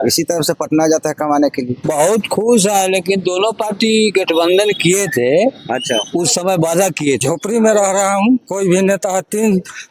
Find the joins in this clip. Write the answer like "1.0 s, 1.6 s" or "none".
1.8 s, 7.2 s